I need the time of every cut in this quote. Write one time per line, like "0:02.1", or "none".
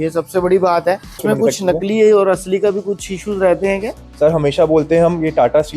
0:01.2